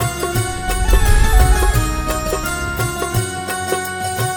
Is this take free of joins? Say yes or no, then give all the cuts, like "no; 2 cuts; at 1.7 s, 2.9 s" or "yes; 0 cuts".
yes; 0 cuts